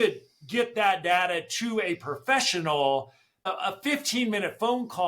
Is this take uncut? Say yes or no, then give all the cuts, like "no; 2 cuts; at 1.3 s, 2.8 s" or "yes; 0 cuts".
no; 1 cut; at 3.5 s